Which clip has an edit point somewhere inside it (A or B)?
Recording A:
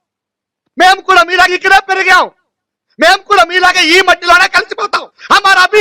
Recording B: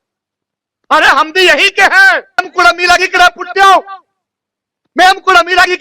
B